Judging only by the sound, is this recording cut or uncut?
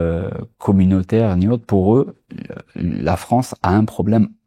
uncut